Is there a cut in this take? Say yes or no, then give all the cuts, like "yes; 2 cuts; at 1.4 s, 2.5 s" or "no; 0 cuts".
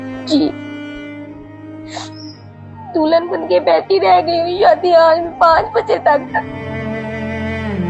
yes; 1 cut; at 6.4 s